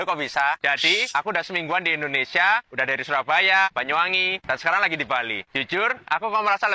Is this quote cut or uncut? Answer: uncut